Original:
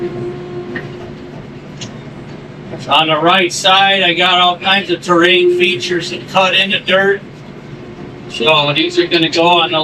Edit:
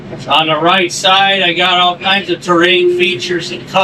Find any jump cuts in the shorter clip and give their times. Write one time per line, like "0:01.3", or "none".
none